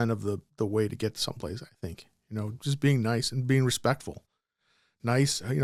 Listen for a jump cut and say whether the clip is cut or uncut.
uncut